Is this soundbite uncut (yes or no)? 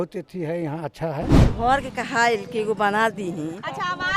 no